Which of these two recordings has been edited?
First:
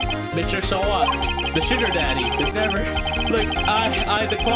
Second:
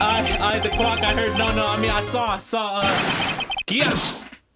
first; 1 cut; at 2.5 s

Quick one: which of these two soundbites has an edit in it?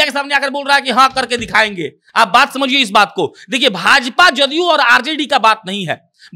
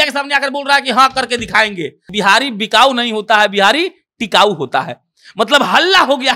second; 1 cut; at 2.0 s

